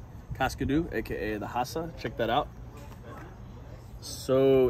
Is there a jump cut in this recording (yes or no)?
no